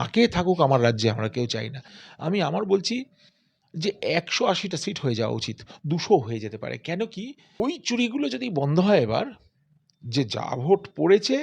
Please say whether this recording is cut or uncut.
cut